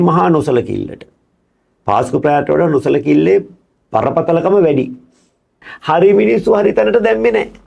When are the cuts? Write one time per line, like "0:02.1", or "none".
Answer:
0:05.7